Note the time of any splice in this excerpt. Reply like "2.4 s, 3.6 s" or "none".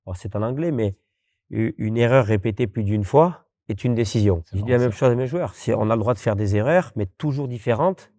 4.5 s